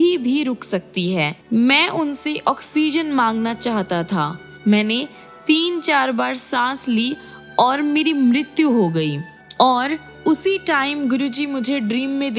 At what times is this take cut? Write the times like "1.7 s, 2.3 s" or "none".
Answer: 1.4 s